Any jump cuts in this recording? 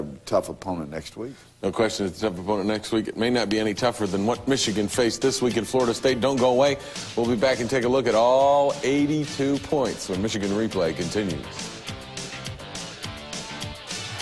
no; 0 cuts

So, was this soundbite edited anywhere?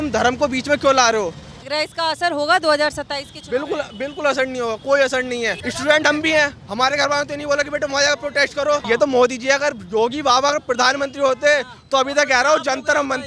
yes; 3 cuts; at 1.6 s, 5.6 s, 8.8 s

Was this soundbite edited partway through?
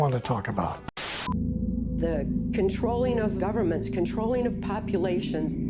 yes; 1 cut; at 1.1 s

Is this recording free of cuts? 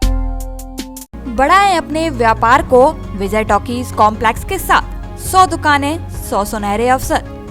yes; 0 cuts

